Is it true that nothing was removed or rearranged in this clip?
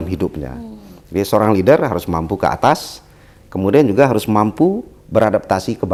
yes; 0 cuts

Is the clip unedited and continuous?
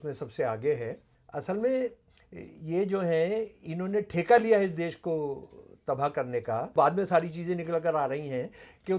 no; 2 cuts; at 1.1 s, 6.7 s

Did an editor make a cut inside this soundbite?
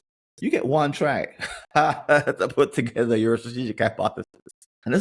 no; 0 cuts

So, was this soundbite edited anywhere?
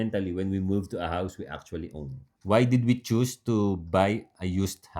yes; 1 cut; at 2.3 s

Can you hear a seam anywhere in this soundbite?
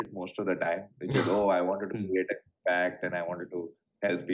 no; 0 cuts

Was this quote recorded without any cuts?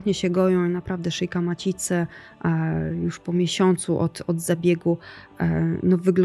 yes; 0 cuts

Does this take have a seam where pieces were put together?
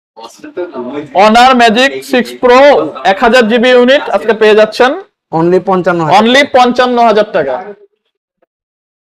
no; 0 cuts

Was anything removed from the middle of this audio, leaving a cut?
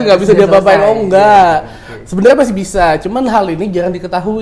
no; 0 cuts

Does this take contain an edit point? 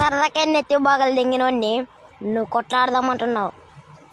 no; 0 cuts

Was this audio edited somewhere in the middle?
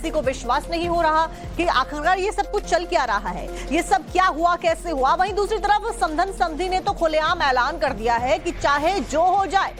no; 0 cuts

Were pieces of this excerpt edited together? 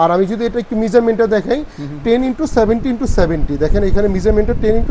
no; 0 cuts

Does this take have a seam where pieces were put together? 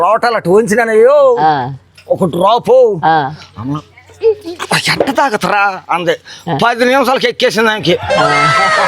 no; 0 cuts

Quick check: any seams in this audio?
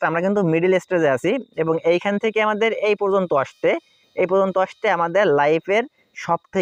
no; 0 cuts

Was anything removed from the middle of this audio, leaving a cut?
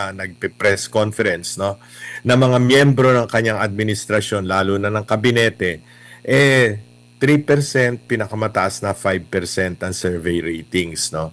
no; 0 cuts

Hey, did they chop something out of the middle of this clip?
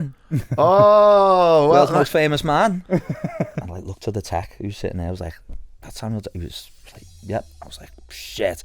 yes; 1 cut; at 3.6 s

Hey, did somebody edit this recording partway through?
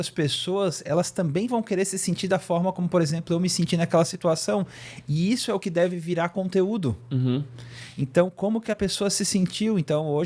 no; 0 cuts

